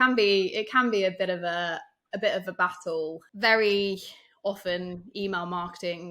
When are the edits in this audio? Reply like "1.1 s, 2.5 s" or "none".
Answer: 3.2 s